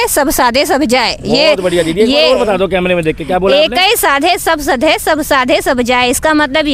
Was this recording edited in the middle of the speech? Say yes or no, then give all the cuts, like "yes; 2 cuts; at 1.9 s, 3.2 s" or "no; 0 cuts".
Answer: no; 0 cuts